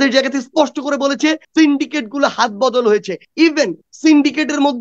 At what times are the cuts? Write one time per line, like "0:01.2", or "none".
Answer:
0:01.4
0:03.5